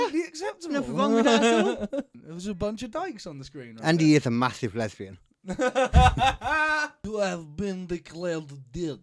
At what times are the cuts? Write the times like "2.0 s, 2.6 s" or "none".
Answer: 2.1 s, 7.0 s